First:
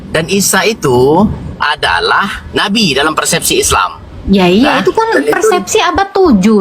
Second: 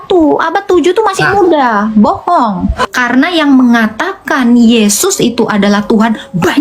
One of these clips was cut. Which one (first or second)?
second